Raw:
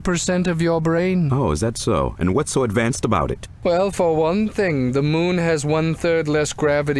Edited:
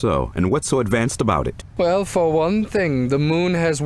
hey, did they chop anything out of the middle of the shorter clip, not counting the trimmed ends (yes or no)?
no